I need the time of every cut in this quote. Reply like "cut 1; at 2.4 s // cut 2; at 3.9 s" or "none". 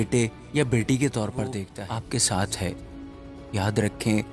cut 1; at 1.7 s